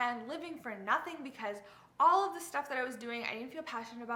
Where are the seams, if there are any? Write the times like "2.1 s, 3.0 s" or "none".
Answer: none